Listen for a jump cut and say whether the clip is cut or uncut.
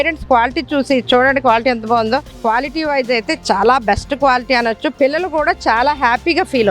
cut